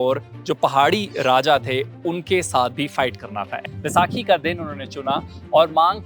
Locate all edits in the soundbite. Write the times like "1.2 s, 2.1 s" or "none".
3.6 s